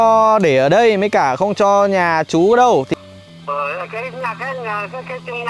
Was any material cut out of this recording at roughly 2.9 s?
yes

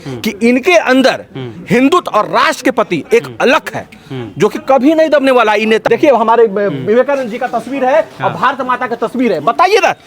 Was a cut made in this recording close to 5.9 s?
yes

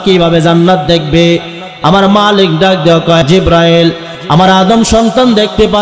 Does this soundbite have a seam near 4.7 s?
no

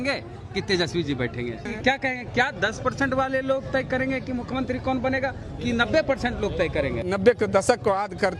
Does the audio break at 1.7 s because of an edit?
yes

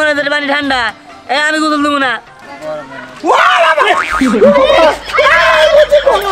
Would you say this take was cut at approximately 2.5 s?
yes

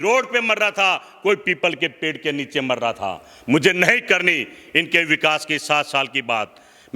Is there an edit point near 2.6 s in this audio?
no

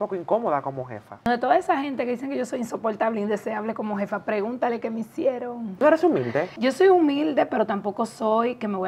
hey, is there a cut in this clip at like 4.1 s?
no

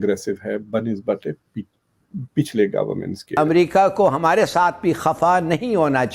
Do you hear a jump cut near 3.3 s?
yes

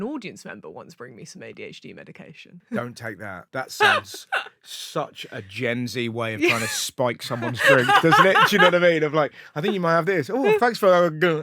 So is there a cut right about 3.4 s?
yes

